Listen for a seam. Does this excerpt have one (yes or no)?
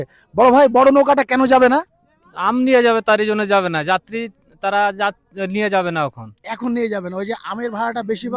no